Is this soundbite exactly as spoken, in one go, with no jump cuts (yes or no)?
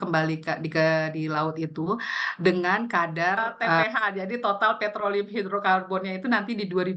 no